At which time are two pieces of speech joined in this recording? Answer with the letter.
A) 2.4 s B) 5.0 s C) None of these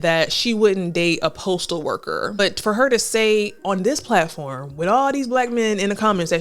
A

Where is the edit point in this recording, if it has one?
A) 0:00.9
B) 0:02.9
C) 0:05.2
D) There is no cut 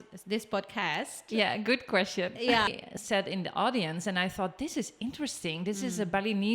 B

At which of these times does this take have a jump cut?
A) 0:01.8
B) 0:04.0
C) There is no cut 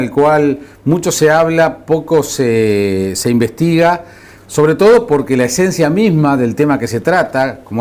C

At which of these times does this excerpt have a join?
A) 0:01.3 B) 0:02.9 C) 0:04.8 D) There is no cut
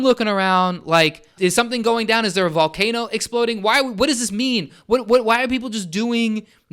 A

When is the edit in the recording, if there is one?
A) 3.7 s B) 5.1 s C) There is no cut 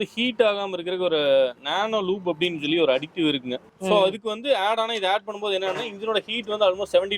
A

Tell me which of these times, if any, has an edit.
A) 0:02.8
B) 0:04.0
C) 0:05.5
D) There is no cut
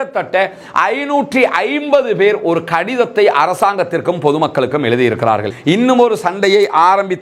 C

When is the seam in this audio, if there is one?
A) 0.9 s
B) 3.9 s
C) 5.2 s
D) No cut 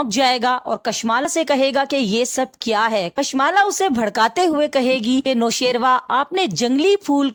D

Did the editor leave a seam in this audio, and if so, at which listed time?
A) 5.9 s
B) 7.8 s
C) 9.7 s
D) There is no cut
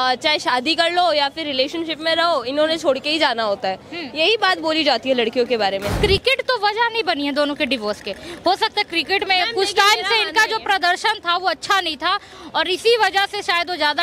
A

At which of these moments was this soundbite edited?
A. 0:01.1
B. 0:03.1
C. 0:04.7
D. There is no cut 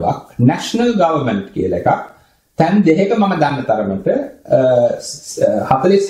D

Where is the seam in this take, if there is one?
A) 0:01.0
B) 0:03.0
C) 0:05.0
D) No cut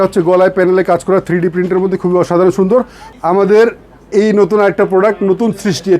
B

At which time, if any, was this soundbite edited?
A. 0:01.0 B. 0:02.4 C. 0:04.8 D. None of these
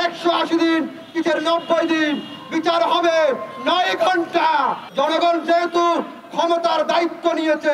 C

